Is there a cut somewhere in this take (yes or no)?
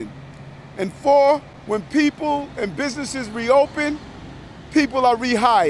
yes